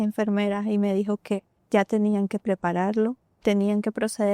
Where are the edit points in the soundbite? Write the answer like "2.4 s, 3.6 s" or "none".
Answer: 1.5 s, 3.3 s